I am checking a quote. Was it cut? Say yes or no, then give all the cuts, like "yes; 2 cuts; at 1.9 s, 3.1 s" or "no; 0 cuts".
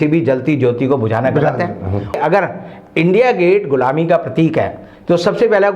yes; 1 cut; at 2.2 s